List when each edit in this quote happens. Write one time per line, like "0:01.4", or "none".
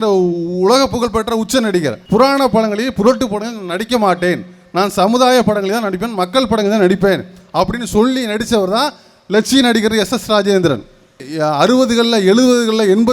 0:02.0
0:11.2